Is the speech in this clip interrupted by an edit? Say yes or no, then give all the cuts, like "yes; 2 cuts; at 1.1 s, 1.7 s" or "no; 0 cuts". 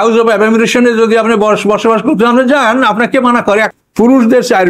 yes; 1 cut; at 3.7 s